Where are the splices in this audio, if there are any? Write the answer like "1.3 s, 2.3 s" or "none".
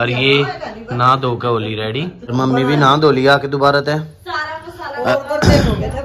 2.3 s